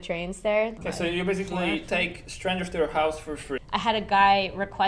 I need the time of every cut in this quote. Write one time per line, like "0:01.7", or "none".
0:00.7
0:03.6

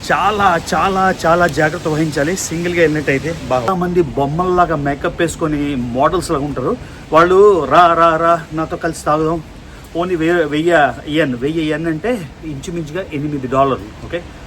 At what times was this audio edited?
0:03.7

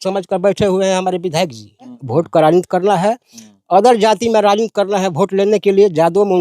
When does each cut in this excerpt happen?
0:02.0

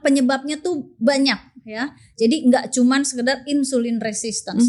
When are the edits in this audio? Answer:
none

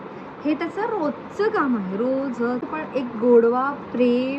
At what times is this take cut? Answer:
0:02.6

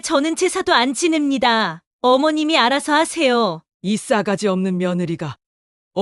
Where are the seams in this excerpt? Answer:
0:03.7

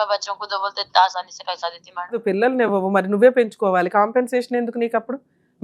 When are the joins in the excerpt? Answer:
0:02.2

